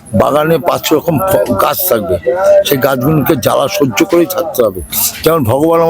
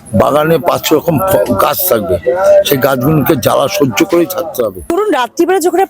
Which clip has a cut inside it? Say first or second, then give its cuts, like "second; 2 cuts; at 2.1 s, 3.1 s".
second; 1 cut; at 4.9 s